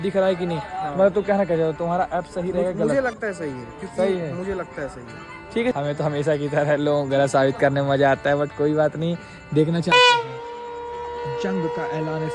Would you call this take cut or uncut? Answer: cut